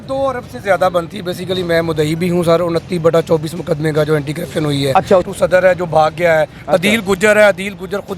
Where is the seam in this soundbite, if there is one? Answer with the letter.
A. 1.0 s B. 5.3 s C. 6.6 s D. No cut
B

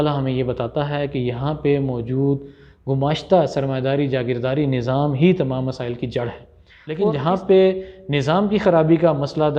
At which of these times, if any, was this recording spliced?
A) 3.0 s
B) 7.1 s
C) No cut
B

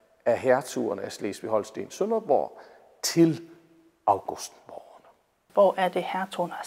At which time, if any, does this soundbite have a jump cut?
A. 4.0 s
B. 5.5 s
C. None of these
B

